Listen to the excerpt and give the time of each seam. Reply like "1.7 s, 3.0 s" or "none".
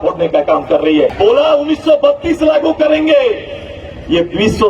1.1 s